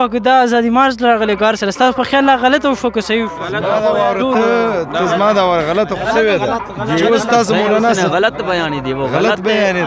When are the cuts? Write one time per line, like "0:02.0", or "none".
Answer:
none